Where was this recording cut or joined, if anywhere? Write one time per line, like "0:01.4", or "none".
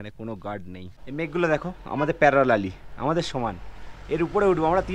0:00.9